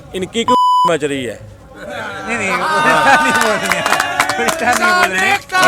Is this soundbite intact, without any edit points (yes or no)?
yes